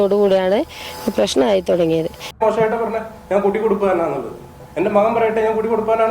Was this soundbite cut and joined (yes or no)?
yes